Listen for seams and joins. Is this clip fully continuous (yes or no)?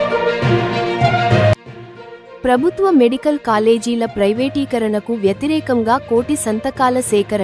no